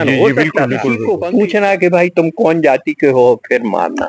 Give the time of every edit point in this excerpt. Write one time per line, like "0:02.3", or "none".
0:01.0

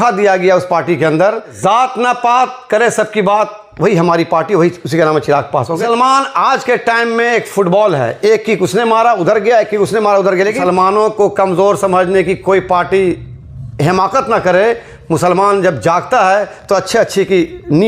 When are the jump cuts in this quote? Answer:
0:01.6
0:05.8
0:10.6

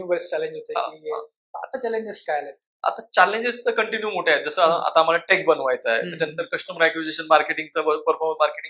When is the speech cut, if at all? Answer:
none

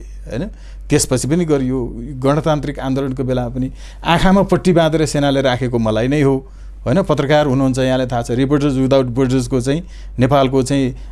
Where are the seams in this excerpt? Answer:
none

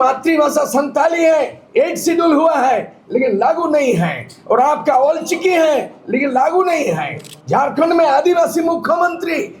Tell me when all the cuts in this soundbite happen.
none

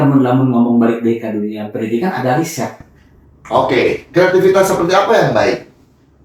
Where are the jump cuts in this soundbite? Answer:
none

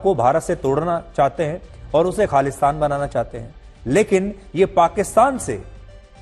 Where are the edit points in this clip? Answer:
none

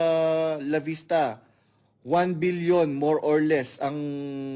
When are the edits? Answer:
none

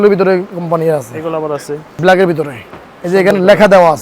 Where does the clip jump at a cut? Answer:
0:01.8

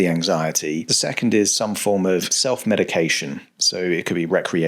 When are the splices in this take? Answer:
0:00.9
0:02.3

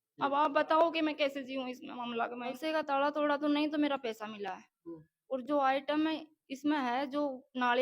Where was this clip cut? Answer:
0:02.3

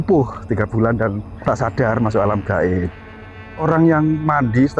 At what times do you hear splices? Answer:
0:01.3
0:03.6

